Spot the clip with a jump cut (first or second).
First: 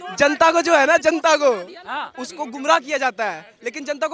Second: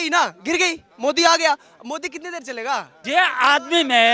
second